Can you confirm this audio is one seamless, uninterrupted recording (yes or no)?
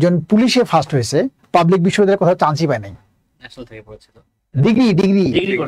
no